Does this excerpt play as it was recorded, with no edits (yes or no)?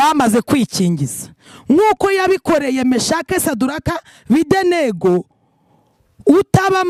yes